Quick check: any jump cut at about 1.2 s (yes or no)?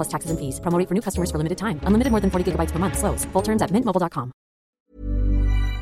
no